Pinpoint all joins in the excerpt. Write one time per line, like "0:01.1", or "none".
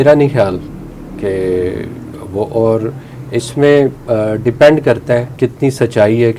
0:04.0
0:05.3